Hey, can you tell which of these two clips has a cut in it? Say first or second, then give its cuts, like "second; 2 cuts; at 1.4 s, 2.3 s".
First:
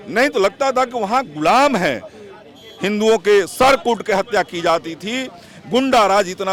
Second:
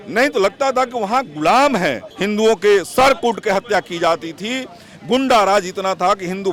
second; 1 cut; at 2.1 s